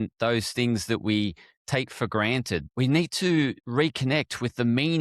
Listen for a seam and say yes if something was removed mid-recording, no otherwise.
yes